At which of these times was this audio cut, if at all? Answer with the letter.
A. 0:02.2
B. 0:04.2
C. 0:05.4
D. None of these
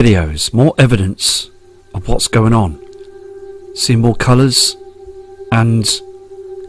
A